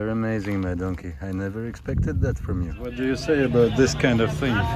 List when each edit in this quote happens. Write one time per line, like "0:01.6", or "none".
0:03.0